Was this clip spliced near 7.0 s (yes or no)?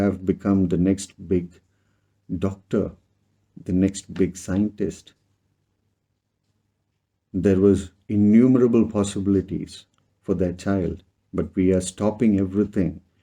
no